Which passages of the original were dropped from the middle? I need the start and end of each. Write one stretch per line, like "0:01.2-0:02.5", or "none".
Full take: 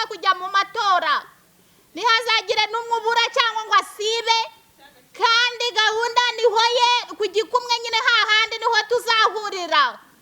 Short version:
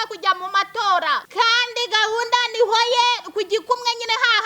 0:01.3-0:05.1